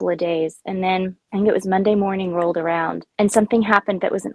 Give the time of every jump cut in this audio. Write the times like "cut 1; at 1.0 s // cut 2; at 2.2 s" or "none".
cut 1; at 1.2 s // cut 2; at 3.0 s